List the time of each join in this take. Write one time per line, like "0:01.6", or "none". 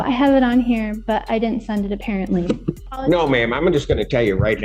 0:02.9

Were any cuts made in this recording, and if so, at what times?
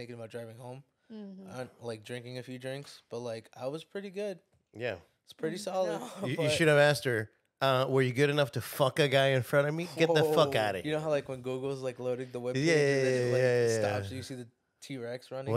0:06.1
0:10.8

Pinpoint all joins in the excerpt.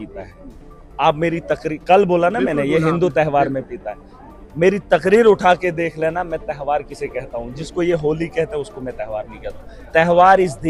none

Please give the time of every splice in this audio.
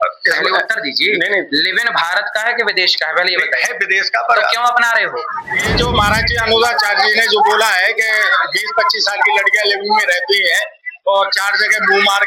0:05.5

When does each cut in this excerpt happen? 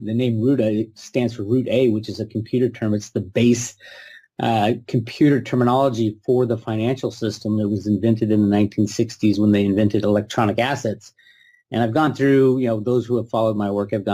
0:09.8

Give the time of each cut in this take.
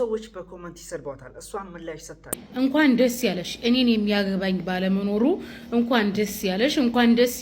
0:02.4

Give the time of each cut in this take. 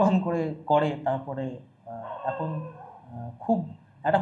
none

